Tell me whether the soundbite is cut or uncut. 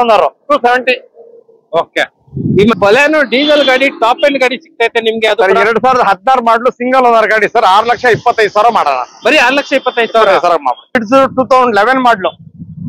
cut